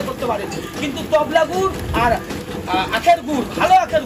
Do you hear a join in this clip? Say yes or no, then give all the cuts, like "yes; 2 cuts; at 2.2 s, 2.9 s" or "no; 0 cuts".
no; 0 cuts